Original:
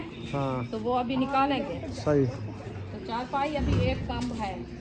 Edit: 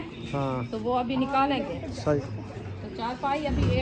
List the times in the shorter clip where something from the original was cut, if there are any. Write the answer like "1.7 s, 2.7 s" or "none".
2.2 s